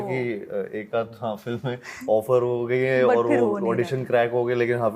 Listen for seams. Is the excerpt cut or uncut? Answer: uncut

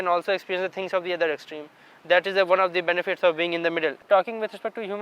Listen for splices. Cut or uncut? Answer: cut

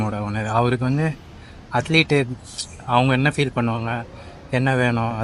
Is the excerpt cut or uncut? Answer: uncut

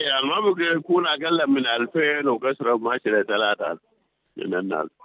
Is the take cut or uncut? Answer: uncut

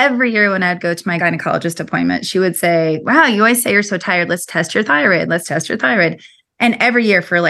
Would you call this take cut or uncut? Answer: cut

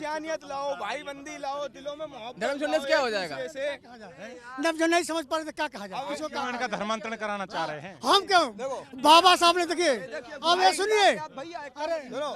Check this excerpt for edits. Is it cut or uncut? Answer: uncut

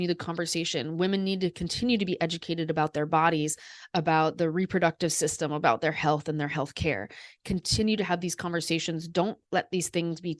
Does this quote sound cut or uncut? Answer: uncut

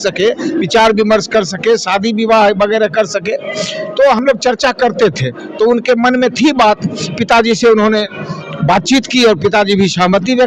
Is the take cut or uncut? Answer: uncut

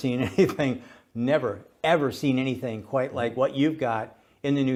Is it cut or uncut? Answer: uncut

